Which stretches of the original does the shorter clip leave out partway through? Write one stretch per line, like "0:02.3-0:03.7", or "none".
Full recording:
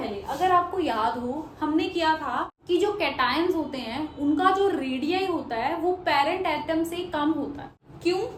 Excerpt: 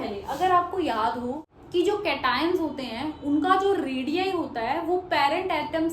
0:01.5-0:02.5

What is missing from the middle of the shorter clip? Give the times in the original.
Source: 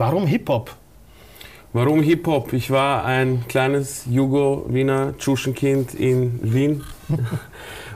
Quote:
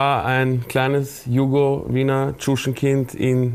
none

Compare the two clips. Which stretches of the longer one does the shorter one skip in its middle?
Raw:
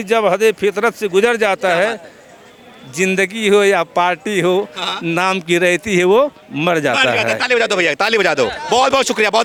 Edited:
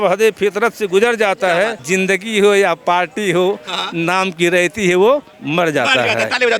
0:02.0-0:02.9

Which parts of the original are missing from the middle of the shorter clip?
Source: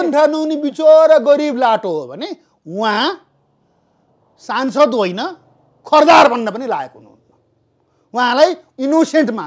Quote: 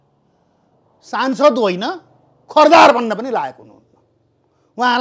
none

